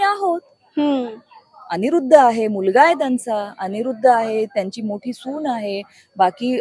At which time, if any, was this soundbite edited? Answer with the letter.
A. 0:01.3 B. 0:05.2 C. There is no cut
C